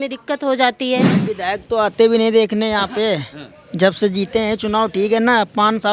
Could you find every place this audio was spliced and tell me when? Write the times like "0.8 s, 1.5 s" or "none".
1.2 s